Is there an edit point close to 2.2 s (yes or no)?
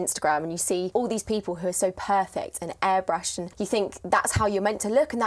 no